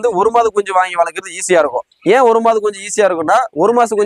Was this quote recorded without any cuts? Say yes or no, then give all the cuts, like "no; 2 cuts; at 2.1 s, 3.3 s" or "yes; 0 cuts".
yes; 0 cuts